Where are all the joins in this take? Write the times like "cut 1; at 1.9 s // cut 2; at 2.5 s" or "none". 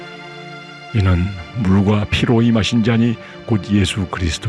cut 1; at 0.9 s

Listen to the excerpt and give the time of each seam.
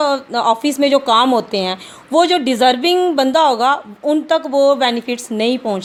none

